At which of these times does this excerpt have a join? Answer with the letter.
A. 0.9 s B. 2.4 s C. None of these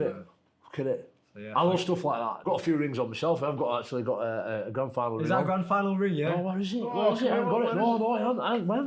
B